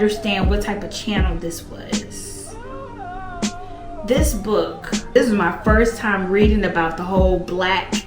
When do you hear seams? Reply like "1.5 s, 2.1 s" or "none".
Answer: 5.2 s